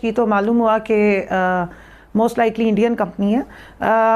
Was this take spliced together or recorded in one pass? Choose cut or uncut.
uncut